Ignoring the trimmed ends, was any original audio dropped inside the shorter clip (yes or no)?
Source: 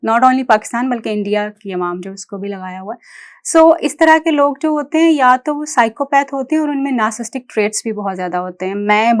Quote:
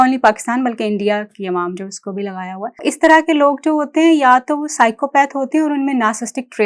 yes